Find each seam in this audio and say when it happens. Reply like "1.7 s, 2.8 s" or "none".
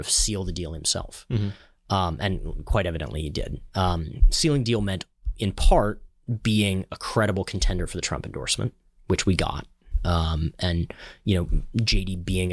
none